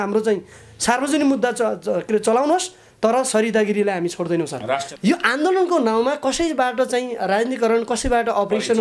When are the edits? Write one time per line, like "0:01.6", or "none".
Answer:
0:04.9